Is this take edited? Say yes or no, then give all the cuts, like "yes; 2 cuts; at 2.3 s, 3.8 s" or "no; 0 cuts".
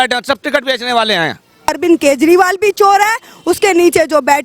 yes; 1 cut; at 1.6 s